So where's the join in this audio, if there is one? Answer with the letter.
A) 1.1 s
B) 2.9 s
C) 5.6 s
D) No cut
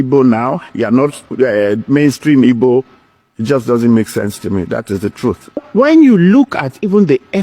C